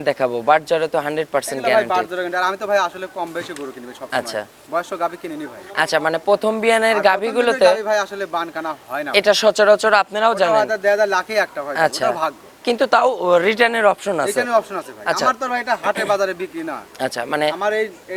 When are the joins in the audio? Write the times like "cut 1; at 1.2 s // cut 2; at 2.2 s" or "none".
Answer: none